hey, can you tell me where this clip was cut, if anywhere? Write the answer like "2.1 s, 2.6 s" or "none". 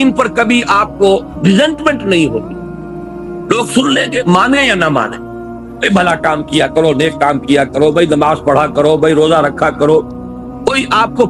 none